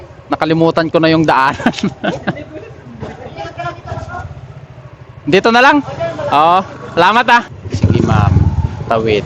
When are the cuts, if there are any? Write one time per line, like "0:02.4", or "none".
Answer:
0:07.6